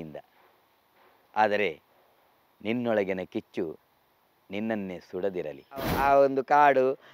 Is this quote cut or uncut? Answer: cut